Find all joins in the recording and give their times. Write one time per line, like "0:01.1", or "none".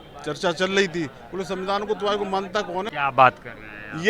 none

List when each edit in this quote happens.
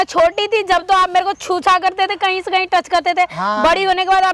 none

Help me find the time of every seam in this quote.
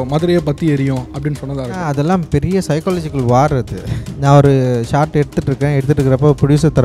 0:01.8
0:04.0

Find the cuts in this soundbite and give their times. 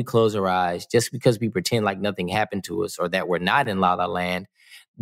none

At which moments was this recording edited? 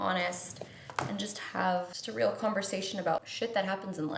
0:02.0
0:03.3

